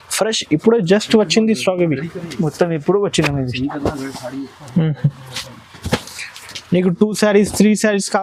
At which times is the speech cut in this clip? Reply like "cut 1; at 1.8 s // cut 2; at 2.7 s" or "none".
none